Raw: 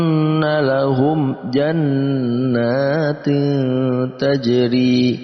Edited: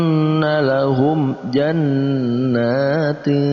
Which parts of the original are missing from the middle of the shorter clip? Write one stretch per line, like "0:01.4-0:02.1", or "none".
none